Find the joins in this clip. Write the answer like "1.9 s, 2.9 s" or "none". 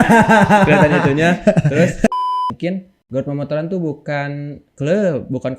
2.1 s